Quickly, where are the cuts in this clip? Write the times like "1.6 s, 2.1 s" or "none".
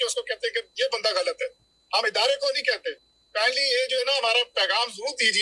none